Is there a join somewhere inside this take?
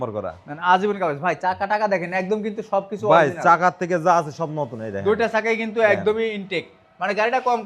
no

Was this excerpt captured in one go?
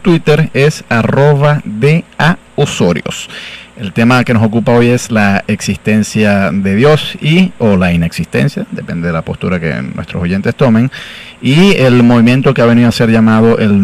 no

